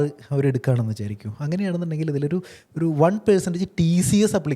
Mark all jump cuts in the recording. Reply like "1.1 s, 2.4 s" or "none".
none